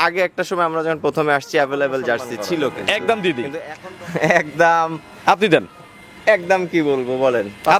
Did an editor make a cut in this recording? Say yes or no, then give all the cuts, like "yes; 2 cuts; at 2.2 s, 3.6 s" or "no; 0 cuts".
yes; 1 cut; at 2.8 s